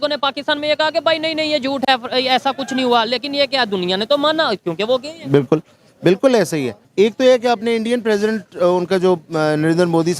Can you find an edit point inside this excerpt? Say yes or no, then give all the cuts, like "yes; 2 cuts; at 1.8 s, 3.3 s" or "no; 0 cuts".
yes; 1 cut; at 6.9 s